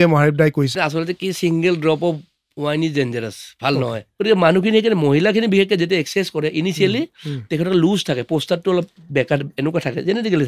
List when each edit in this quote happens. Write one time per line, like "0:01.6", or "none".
0:00.7
0:04.0